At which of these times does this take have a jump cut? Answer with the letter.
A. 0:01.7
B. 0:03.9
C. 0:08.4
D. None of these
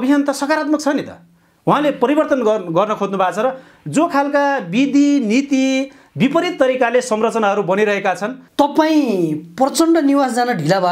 C